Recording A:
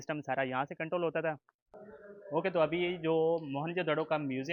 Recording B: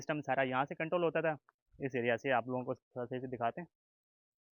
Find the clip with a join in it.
A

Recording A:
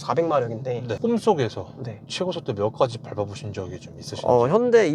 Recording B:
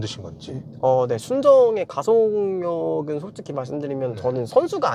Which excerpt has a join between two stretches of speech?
A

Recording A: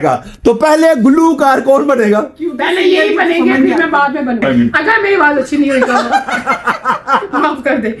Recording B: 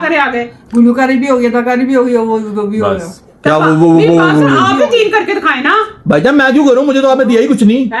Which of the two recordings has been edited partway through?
A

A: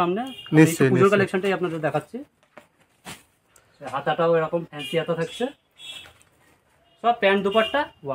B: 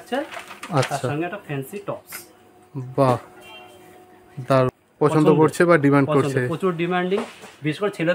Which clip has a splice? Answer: B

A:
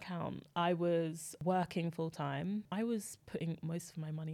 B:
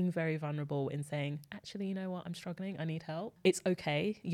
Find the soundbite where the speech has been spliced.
A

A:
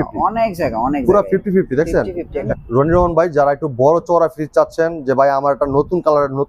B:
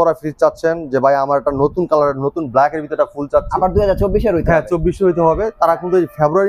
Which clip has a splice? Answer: A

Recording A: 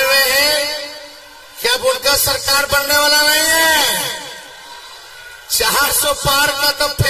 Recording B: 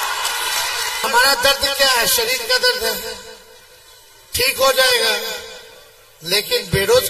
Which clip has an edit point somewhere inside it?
B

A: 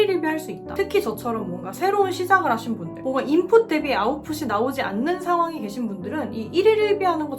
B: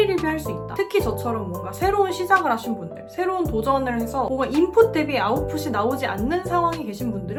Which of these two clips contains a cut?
A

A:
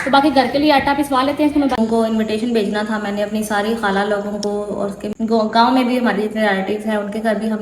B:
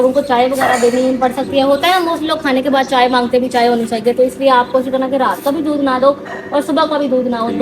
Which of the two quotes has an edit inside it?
A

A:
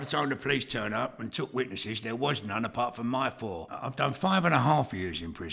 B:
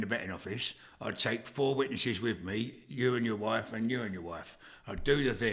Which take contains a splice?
A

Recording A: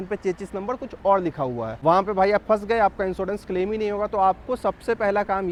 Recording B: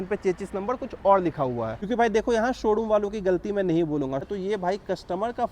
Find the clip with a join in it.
B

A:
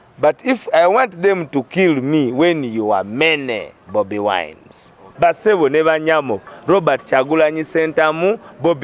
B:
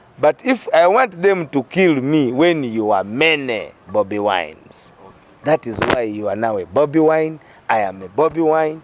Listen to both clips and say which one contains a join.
A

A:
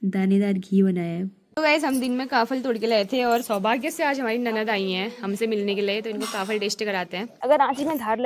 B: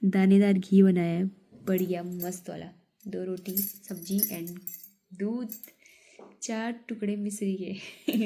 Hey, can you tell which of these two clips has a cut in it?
A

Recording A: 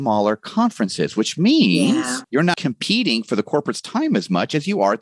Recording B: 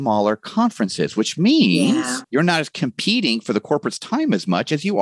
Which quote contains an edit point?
A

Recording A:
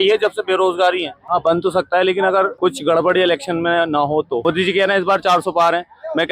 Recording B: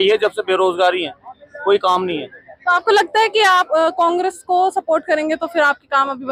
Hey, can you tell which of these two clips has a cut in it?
A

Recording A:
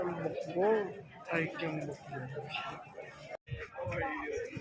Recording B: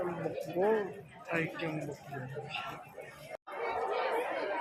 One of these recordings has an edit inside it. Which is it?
A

